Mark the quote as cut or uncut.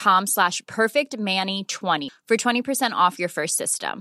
uncut